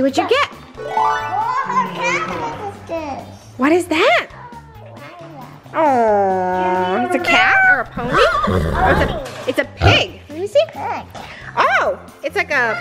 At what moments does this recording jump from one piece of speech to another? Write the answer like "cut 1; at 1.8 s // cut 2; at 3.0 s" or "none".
none